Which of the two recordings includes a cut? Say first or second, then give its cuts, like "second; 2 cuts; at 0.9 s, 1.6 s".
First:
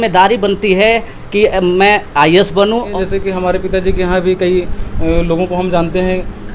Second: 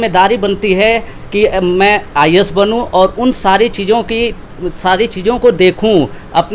first; 1 cut; at 2.9 s